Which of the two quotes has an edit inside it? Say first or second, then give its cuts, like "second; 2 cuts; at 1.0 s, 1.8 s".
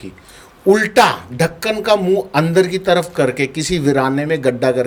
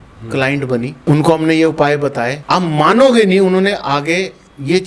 second; 2 cuts; at 1.0 s, 2.4 s